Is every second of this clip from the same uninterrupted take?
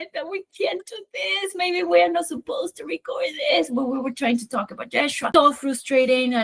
no; 1 cut; at 5.3 s

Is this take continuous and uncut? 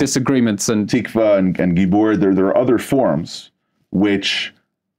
yes; 0 cuts

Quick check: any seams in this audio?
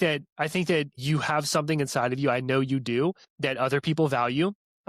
yes; 2 cuts; at 1.0 s, 3.3 s

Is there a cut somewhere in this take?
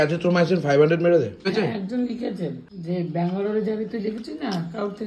yes; 2 cuts; at 1.4 s, 2.6 s

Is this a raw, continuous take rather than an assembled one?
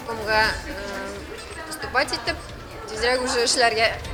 yes; 0 cuts

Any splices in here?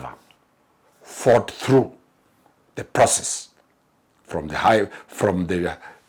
no; 0 cuts

